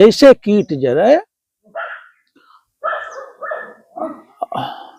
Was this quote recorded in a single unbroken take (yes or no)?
yes